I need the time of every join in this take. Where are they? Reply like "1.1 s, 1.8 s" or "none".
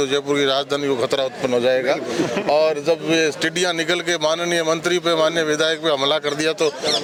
none